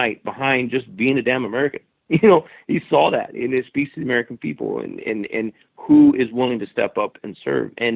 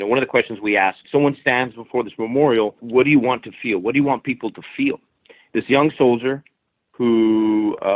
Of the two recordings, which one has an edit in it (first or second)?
second